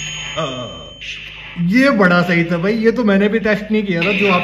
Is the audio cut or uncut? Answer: uncut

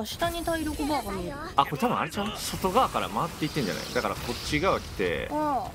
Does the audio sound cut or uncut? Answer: cut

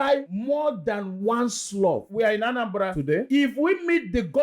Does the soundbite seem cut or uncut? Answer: cut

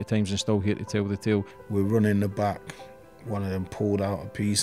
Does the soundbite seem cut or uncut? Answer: cut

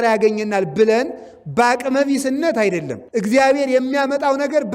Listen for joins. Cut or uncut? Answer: cut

